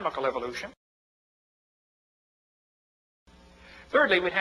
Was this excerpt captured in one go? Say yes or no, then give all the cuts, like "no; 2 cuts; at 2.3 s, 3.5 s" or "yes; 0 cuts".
yes; 0 cuts